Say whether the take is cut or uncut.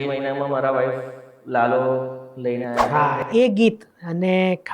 cut